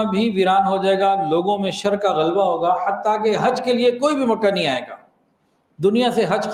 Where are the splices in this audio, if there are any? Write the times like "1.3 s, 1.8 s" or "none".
none